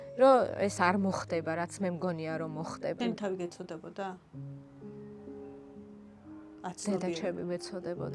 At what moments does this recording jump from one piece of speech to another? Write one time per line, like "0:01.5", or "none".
0:02.9

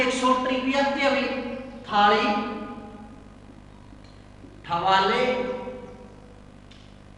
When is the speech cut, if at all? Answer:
none

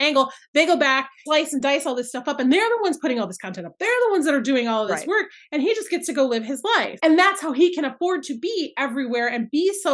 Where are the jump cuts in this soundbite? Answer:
0:01.2
0:06.9

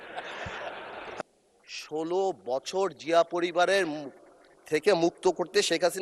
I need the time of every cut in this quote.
0:01.4

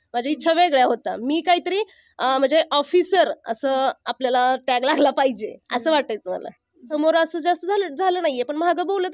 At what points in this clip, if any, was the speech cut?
0:06.9

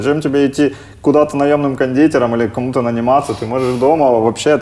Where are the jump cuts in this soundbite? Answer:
none

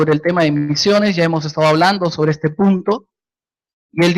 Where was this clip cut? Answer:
0:02.5

